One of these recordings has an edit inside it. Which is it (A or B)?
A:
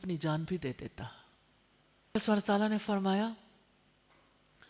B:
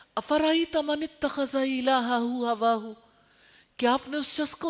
A